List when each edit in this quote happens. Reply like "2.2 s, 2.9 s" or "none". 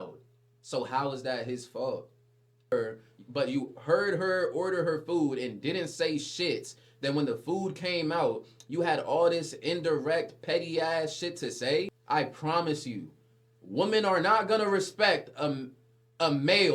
2.7 s, 12.0 s